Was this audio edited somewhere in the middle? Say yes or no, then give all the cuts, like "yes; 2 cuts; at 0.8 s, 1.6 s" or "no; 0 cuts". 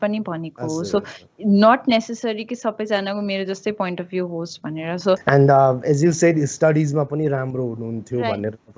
yes; 1 cut; at 5.2 s